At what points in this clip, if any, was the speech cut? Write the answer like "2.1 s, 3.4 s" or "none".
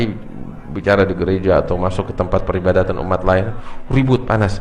none